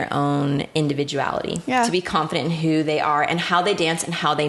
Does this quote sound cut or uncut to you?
uncut